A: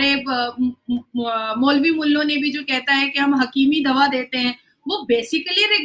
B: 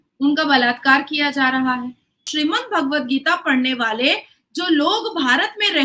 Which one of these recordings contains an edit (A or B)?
B